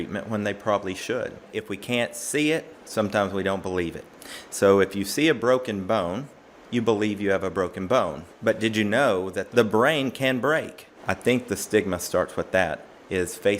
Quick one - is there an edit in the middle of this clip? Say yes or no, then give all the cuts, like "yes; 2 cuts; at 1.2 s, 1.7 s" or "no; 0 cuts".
yes; 4 cuts; at 1.5 s, 8.2 s, 9.4 s, 10.9 s